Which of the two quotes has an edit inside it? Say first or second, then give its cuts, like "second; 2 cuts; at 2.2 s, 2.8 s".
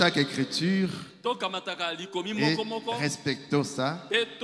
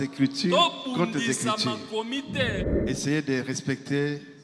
second; 1 cut; at 2.7 s